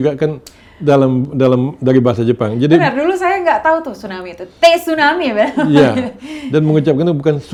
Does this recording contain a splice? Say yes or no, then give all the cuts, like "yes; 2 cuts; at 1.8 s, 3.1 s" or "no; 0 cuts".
no; 0 cuts